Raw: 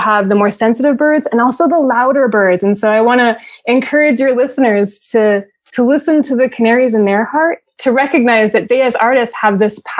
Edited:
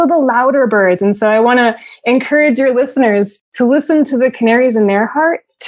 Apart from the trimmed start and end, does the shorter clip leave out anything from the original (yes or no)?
yes